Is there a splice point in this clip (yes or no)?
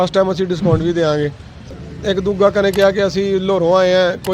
yes